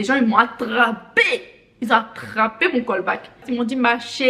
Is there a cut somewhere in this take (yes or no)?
no